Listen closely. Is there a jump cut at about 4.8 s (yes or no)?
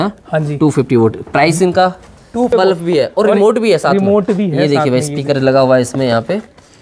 no